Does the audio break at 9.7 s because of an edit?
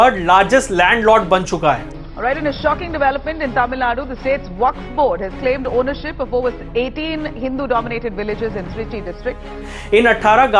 yes; 2 cuts; at 1.8 s, 9.7 s

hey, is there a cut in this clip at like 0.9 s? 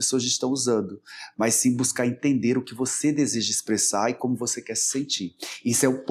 no; 0 cuts

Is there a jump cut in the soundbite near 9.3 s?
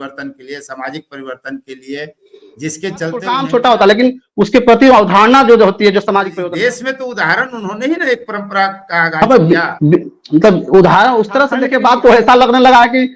no; 3 cuts; at 3.4 s, 6.3 s, 11.6 s

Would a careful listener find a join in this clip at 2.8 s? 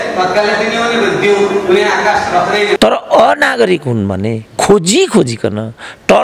yes; 1 cut; at 2.8 s

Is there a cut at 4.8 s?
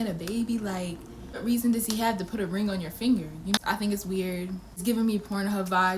yes; 3 cuts; at 1.4 s, 3.6 s, 4.8 s

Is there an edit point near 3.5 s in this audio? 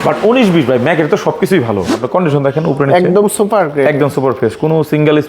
no; 1 cut; at 2.0 s

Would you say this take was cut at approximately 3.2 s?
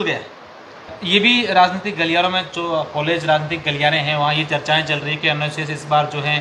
no; 1 cut; at 1.0 s

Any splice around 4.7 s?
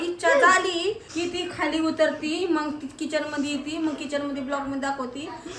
no; 1 cut; at 1.1 s

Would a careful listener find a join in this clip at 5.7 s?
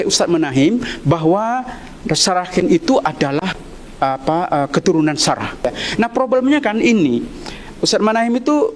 yes; 1 cut; at 5.7 s

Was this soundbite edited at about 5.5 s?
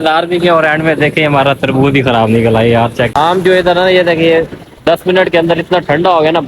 no; 1 cut; at 3.1 s

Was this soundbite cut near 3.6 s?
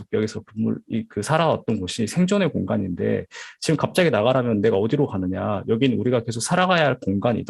no; 0 cuts

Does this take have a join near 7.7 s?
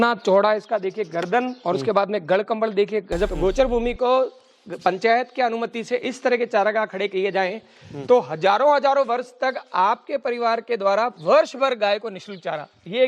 no; 1 cut; at 3.3 s

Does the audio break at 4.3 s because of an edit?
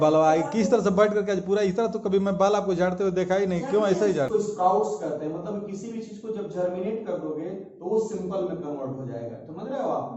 yes; 1 cut; at 4.3 s

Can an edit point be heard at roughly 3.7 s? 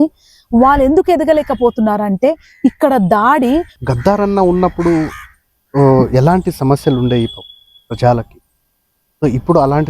yes; 1 cut; at 3.7 s

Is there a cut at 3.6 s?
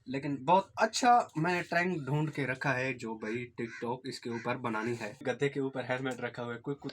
no; 1 cut; at 5.2 s

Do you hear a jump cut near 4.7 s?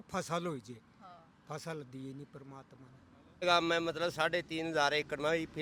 no; 1 cut; at 3.4 s

